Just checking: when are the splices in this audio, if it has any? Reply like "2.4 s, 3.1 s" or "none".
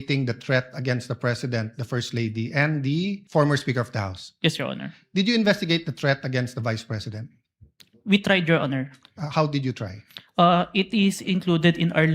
3.2 s